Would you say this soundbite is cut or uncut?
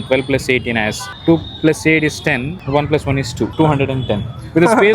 cut